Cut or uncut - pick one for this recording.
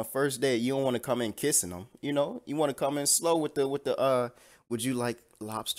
uncut